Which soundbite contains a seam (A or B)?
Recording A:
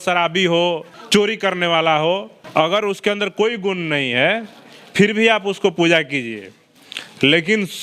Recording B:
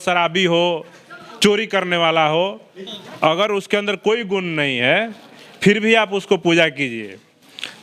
A